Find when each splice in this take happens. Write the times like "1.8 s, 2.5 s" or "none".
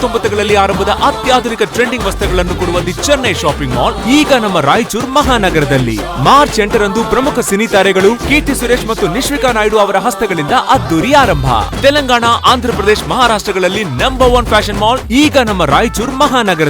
none

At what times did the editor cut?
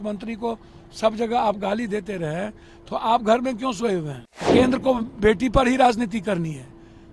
4.5 s

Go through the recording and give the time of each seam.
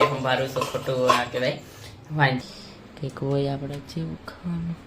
2.4 s

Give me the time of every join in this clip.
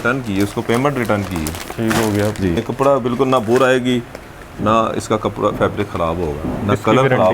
2.6 s

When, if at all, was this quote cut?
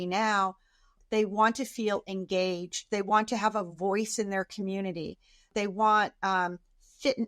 0.9 s, 5.5 s

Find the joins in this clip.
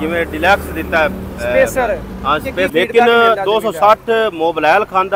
2.7 s

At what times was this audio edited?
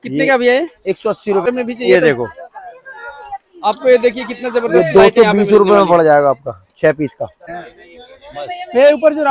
1.5 s, 7.7 s

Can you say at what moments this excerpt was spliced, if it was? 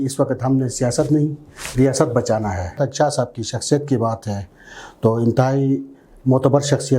2.7 s

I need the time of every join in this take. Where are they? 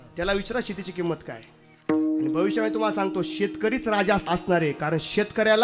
4.3 s

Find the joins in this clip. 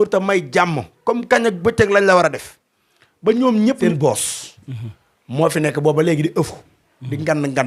3.8 s

